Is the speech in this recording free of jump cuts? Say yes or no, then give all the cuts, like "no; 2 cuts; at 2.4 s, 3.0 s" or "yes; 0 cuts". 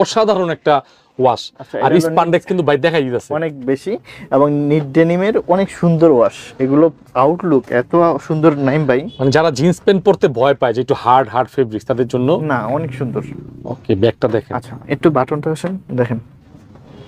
yes; 0 cuts